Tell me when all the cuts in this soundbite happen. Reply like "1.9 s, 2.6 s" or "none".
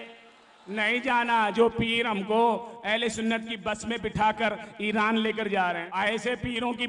5.9 s

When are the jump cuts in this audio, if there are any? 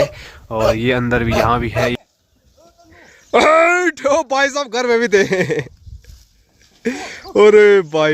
2.0 s

